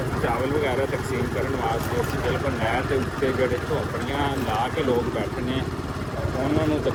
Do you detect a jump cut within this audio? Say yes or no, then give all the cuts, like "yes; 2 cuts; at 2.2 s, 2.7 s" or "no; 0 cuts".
no; 0 cuts